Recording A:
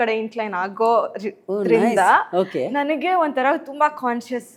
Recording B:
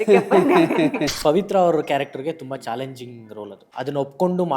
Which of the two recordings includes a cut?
B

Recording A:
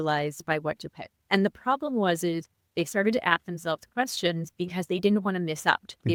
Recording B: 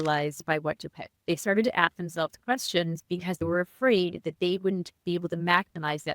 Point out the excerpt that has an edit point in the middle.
B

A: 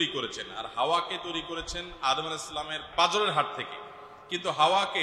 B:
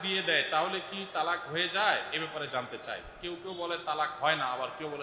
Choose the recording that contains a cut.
A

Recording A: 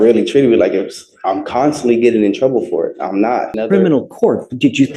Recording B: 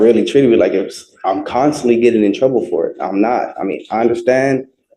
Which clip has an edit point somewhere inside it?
A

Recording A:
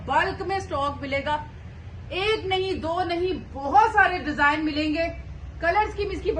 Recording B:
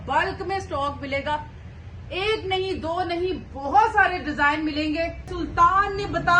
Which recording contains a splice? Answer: B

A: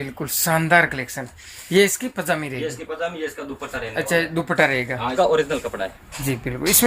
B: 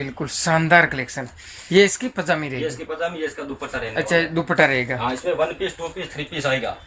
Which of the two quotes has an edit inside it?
A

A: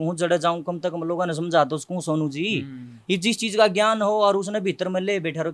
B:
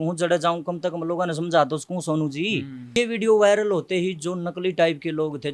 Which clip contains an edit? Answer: B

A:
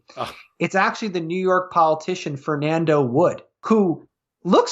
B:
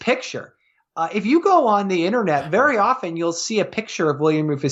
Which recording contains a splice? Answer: A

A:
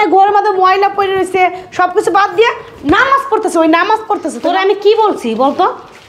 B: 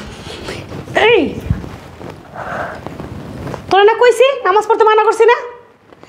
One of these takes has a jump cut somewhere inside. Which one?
A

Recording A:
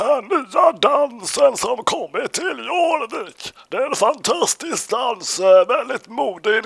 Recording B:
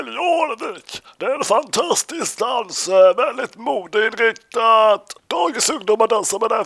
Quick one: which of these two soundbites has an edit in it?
B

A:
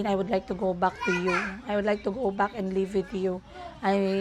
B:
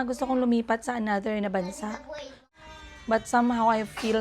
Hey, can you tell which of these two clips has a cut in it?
B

